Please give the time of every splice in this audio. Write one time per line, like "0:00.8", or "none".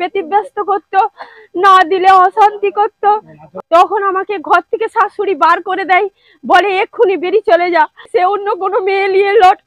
0:03.4
0:08.1